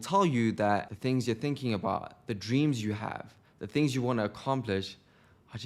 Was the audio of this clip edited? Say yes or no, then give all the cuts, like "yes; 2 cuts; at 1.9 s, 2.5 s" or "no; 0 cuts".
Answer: yes; 1 cut; at 0.9 s